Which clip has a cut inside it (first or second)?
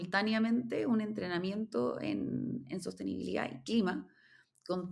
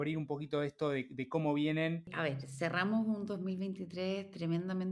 second